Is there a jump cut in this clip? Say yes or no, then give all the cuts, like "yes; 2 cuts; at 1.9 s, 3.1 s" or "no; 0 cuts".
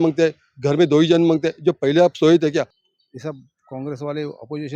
yes; 1 cut; at 2.8 s